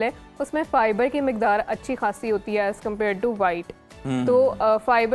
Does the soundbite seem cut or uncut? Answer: uncut